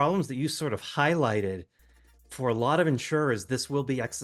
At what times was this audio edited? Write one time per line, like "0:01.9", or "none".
none